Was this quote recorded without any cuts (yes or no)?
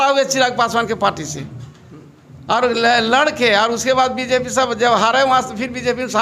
yes